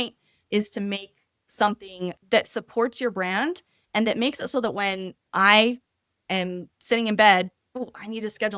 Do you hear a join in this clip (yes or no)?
no